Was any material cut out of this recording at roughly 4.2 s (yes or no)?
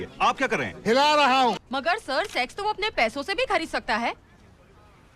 no